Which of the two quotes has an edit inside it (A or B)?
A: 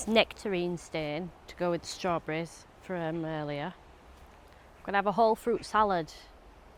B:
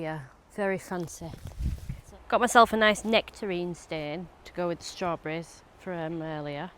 B